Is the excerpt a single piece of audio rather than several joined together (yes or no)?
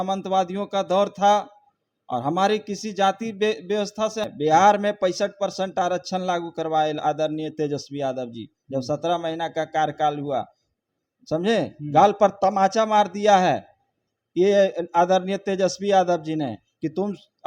no